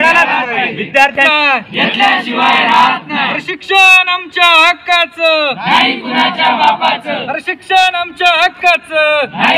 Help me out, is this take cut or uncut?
cut